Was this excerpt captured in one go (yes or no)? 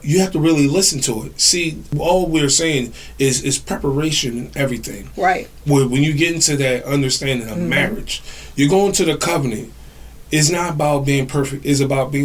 no